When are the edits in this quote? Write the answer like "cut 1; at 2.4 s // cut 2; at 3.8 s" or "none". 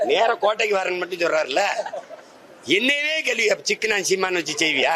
none